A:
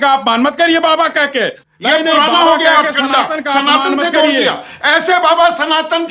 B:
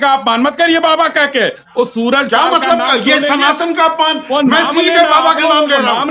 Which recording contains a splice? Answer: A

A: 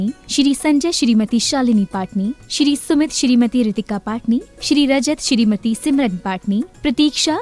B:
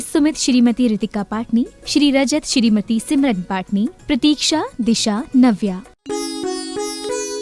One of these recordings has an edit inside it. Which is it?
B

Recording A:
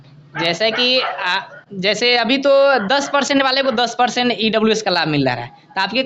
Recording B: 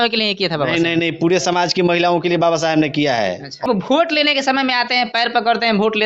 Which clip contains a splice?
B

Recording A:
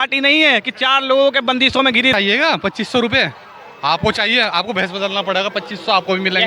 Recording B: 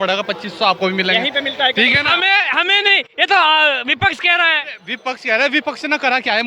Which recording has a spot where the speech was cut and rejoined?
A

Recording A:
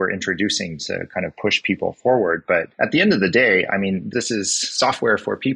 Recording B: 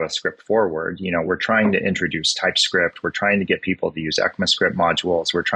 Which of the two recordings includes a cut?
A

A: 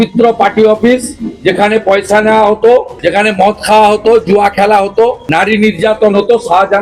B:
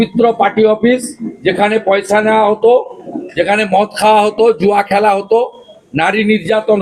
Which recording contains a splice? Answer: A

